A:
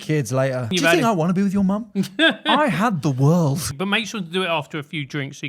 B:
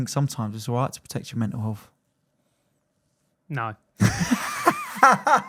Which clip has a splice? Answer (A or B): A